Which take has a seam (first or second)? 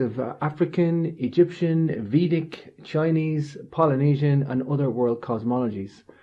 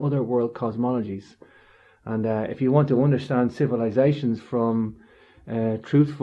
first